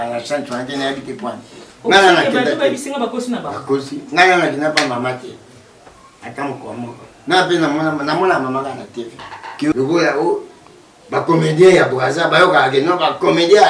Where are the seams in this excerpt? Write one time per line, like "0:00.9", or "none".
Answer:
0:09.7